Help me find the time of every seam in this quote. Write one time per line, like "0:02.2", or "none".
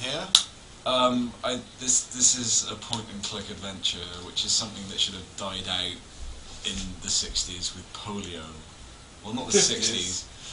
none